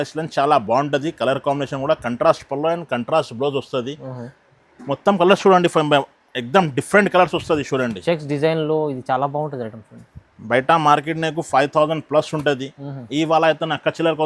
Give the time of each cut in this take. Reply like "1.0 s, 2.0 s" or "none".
none